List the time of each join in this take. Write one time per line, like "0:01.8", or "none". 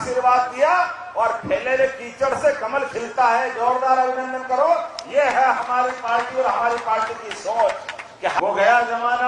0:08.4